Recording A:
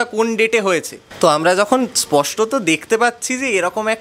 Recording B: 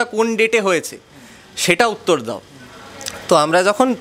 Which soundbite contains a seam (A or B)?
A